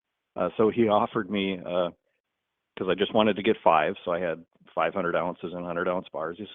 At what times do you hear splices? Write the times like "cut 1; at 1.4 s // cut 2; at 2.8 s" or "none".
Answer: none